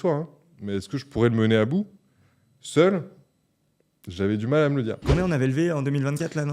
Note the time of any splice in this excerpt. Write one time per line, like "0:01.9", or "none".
0:05.0